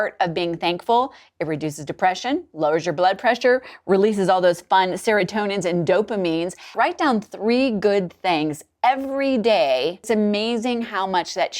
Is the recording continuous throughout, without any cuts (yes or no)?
no